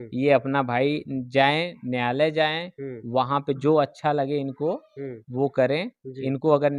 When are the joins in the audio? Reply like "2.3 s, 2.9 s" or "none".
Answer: none